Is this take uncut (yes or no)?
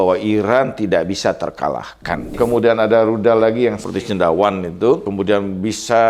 no